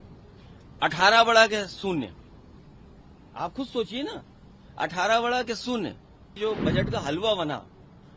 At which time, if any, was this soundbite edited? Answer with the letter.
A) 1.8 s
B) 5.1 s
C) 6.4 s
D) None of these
C